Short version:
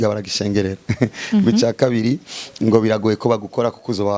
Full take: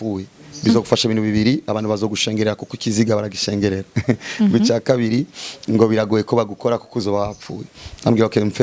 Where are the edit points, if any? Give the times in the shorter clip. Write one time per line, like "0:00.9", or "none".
none